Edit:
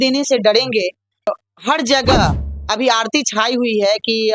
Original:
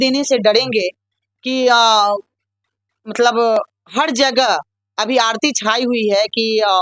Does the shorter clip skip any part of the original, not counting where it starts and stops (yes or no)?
yes